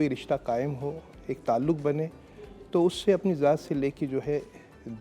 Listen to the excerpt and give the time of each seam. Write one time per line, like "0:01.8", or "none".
none

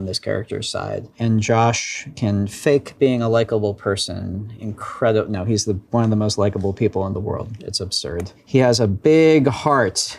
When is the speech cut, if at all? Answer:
0:01.1

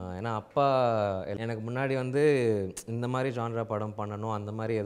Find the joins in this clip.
0:01.3

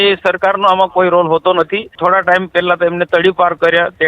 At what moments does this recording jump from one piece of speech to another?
0:01.9

